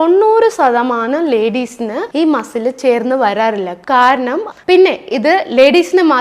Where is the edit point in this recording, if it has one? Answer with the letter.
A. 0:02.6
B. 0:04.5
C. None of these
B